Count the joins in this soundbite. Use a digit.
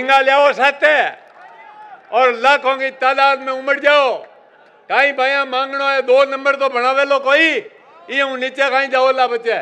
0